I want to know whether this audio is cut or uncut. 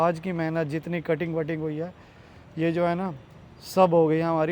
uncut